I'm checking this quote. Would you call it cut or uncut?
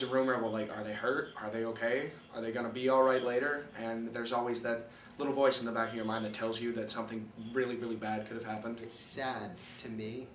cut